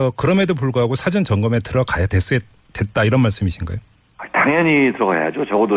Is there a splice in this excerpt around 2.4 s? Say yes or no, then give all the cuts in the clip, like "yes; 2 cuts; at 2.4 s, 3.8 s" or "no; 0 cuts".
no; 0 cuts